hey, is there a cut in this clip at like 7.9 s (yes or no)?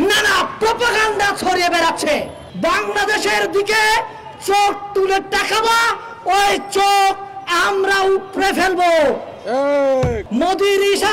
no